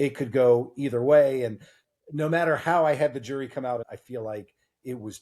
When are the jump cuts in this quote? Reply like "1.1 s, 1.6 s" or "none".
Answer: 3.9 s